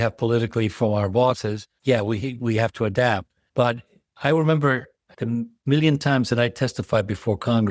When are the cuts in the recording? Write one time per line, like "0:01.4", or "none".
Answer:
none